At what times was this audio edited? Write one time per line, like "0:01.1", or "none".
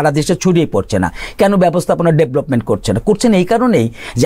none